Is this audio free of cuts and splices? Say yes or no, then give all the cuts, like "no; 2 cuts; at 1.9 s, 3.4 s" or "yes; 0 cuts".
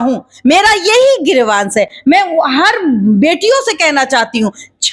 yes; 0 cuts